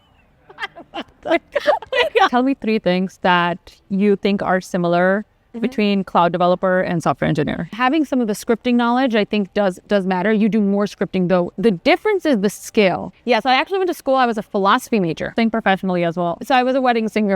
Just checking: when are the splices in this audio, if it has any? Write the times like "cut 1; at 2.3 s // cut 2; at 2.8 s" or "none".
cut 1; at 2.3 s // cut 2; at 7.8 s // cut 3; at 11.5 s // cut 4; at 13.1 s // cut 5; at 15.2 s